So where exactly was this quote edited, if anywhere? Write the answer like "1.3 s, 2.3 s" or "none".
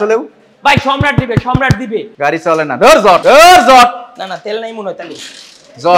2.1 s, 3.2 s